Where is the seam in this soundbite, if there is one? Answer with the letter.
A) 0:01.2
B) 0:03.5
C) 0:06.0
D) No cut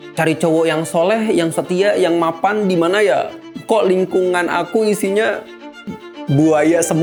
D